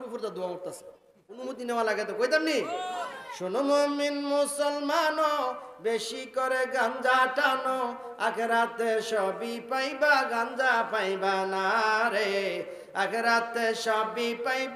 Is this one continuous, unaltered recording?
no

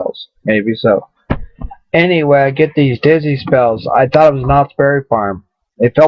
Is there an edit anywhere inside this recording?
no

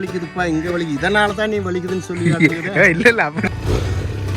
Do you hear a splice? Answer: yes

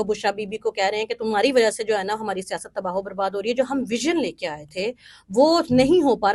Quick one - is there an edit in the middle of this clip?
no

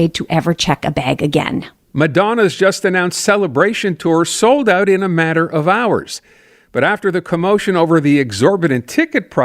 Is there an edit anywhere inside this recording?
yes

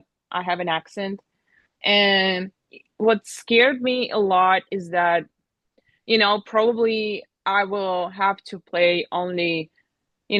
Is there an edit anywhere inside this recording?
no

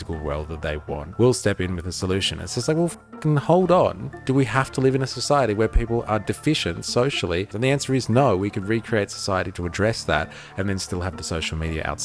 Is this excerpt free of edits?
no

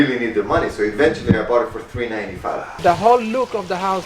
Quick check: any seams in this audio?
yes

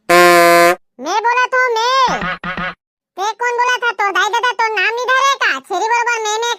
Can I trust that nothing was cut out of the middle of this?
yes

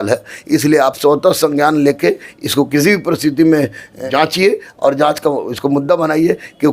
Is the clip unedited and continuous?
no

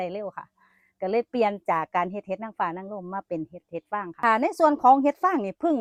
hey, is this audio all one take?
yes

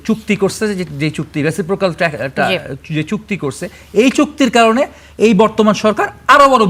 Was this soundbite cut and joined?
no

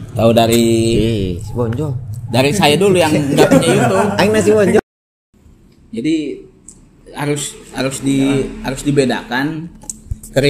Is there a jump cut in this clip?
yes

